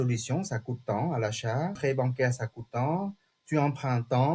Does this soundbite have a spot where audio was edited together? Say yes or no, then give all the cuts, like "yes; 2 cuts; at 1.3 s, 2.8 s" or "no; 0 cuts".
yes; 1 cut; at 1.8 s